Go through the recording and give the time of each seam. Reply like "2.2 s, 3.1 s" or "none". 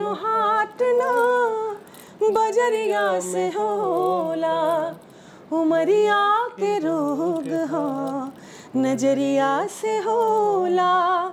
none